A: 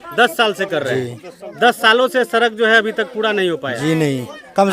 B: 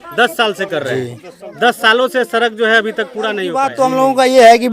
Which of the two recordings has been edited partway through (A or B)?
B